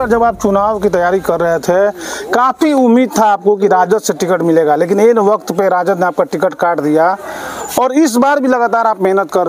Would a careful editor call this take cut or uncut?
uncut